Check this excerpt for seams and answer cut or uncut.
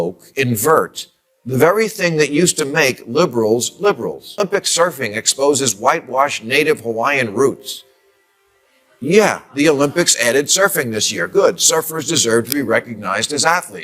cut